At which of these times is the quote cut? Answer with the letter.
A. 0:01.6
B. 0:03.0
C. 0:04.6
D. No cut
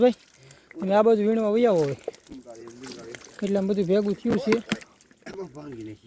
D